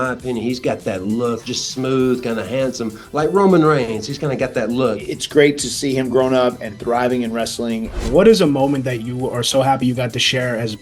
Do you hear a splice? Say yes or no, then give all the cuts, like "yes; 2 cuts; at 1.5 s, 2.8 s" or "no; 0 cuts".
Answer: yes; 3 cuts; at 1.4 s, 5.1 s, 8.0 s